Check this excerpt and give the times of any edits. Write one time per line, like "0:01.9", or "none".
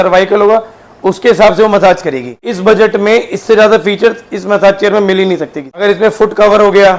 0:02.5
0:05.8